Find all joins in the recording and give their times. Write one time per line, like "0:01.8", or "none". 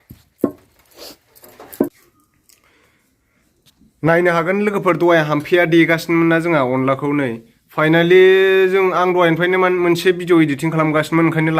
0:01.9